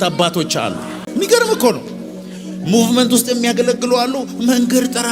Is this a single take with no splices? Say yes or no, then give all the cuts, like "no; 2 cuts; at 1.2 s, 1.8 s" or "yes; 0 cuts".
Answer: no; 1 cut; at 0.9 s